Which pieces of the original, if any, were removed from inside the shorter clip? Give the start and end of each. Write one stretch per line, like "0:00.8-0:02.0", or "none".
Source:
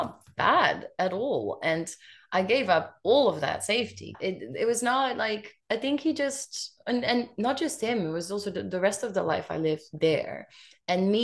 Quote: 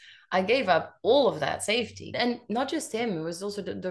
0:04.2-0:07.0